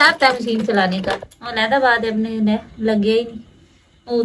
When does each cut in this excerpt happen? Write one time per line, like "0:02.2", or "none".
none